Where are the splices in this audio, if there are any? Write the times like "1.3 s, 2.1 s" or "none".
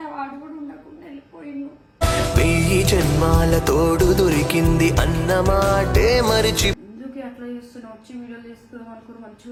none